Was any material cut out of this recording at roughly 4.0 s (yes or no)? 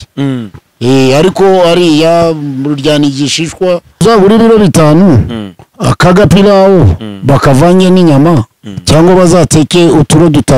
yes